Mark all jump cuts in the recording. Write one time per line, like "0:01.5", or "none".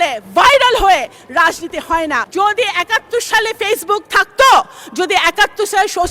0:02.3